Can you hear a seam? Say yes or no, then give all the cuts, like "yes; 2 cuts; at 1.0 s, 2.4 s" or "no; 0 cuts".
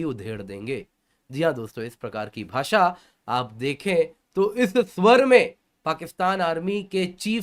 no; 0 cuts